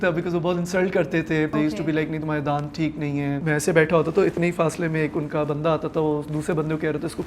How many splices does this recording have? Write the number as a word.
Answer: two